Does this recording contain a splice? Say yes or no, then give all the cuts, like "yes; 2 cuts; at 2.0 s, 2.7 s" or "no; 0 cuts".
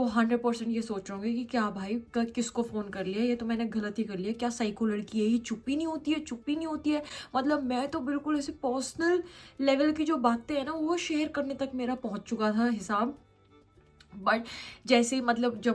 no; 0 cuts